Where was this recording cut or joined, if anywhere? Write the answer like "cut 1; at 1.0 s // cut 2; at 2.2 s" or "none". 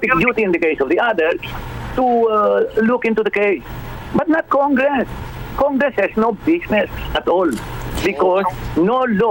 none